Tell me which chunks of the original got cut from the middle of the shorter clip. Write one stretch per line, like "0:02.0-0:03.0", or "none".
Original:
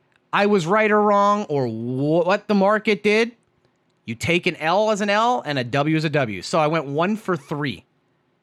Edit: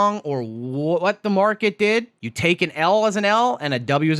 0:03.5-0:04.1